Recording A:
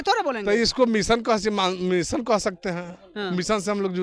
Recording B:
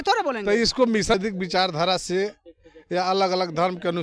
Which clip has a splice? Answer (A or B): B